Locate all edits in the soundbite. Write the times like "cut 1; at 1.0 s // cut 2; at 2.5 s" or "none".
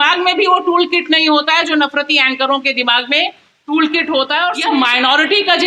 cut 1; at 4.6 s